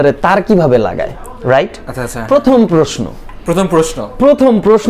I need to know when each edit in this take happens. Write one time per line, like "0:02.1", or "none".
none

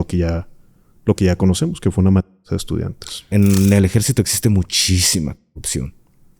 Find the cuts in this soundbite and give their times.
0:03.3

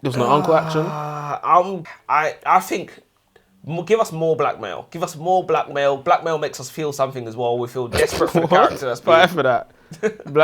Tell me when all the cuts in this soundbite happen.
0:01.8

